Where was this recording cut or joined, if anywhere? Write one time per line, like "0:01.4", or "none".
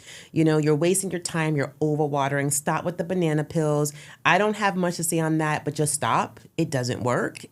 none